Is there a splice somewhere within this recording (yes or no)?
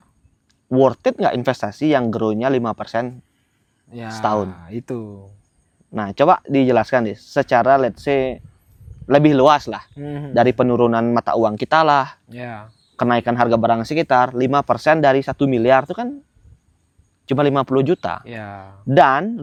no